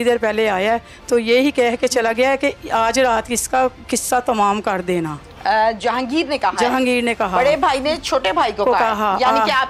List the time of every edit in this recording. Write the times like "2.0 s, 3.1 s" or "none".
none